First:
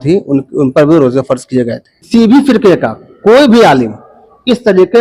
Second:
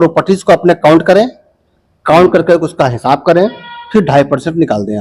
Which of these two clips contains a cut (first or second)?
first